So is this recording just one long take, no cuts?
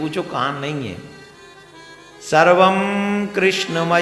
yes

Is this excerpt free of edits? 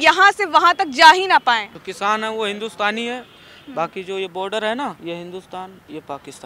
no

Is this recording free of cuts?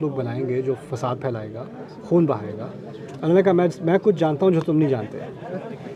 yes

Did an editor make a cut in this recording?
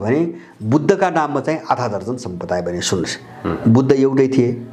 no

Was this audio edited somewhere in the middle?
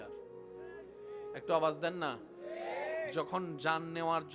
no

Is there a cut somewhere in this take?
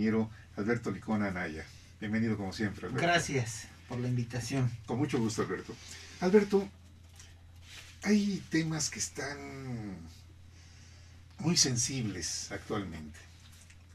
no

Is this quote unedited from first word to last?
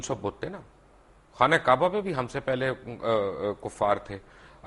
yes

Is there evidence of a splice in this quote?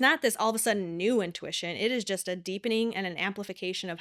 no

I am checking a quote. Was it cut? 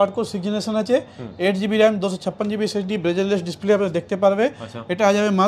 no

